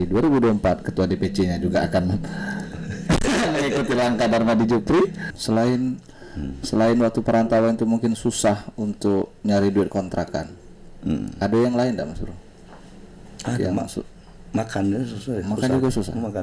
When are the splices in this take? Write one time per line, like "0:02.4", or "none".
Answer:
0:05.3